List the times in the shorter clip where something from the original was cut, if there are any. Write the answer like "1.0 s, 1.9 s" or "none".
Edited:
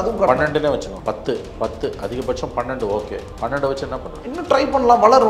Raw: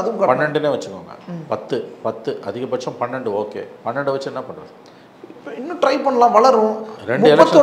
1.0 s, 4.2 s